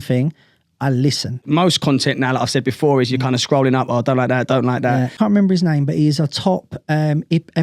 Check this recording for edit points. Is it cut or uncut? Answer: cut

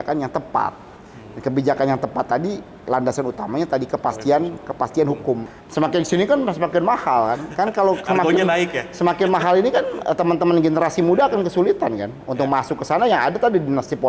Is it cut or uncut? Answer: cut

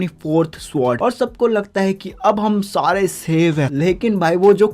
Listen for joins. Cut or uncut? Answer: cut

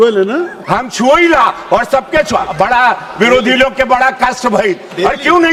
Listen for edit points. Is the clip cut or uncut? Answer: uncut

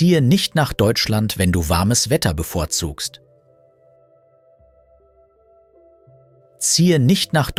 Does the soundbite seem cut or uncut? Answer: uncut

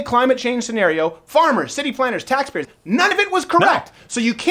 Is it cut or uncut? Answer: cut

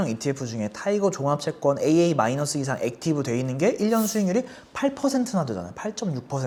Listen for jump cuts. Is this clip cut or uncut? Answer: uncut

